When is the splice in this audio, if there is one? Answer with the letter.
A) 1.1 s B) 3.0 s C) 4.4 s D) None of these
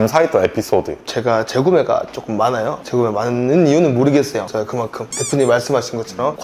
A